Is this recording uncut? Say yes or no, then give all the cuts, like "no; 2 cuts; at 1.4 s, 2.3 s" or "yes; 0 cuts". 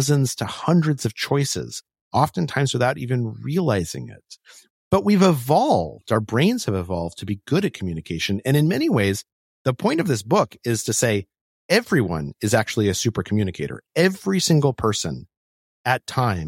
no; 1 cut; at 4.9 s